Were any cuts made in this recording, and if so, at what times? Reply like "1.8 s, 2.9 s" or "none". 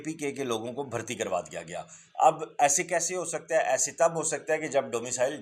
none